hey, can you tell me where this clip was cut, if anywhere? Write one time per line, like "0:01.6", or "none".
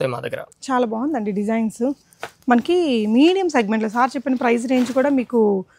none